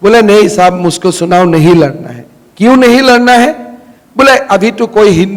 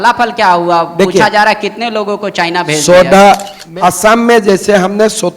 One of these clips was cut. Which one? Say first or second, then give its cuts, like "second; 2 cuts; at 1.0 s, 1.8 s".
second; 1 cut; at 3.6 s